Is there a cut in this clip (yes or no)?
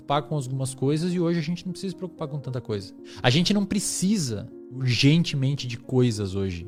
no